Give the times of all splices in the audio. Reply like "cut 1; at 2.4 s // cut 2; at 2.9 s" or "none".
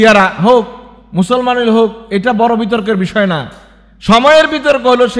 none